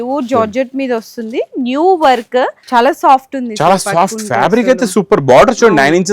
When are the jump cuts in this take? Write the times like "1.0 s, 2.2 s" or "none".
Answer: 2.6 s